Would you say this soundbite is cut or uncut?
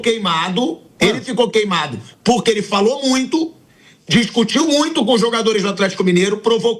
uncut